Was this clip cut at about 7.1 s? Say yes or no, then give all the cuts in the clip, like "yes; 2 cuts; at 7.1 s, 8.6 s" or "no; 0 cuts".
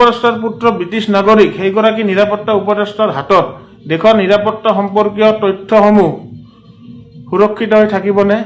no; 0 cuts